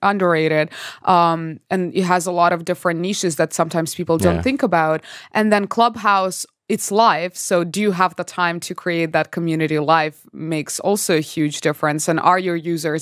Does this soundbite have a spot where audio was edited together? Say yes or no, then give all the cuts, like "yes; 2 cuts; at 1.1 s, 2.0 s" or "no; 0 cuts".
no; 0 cuts